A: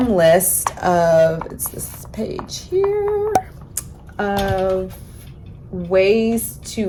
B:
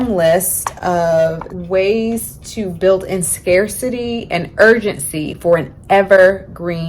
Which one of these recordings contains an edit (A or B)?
B